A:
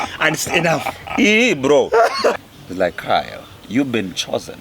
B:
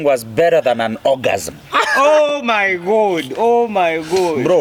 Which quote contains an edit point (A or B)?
A